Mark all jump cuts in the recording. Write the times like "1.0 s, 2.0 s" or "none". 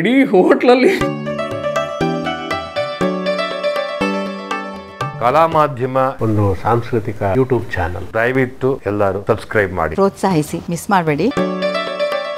1.1 s, 9.9 s, 11.3 s